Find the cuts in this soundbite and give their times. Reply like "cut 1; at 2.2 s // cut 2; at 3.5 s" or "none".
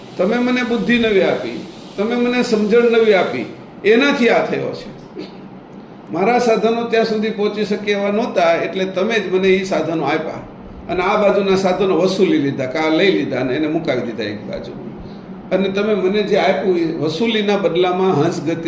none

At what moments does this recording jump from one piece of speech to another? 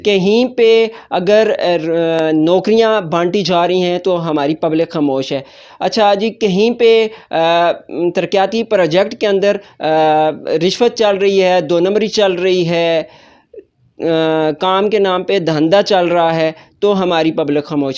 none

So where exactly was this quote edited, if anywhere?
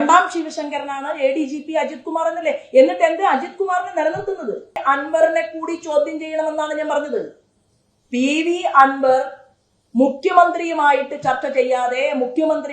cut 1; at 4.8 s

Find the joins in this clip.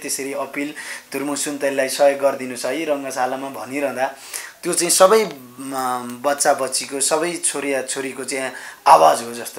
none

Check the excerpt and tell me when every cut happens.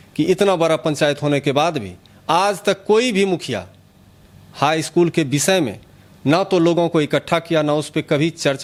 none

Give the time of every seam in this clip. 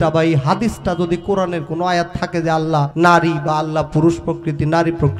cut 1; at 2.9 s

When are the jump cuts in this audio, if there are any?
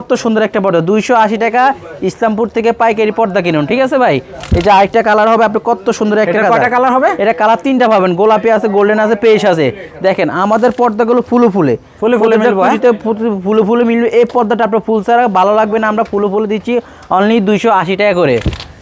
none

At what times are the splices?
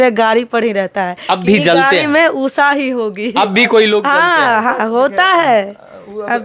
none

